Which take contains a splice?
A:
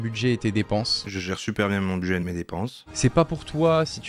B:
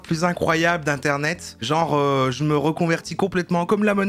A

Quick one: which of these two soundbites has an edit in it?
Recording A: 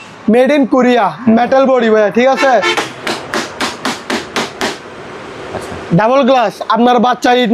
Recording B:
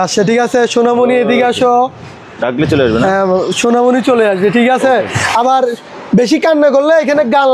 A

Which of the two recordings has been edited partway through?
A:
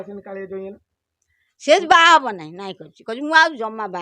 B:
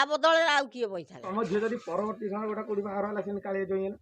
B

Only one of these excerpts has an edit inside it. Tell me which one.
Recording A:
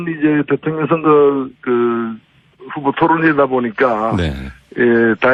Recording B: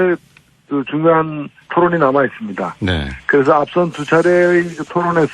B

